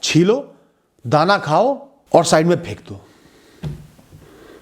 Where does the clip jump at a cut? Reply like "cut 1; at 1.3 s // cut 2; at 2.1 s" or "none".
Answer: cut 1; at 1.9 s